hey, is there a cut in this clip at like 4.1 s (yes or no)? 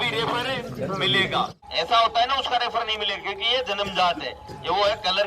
no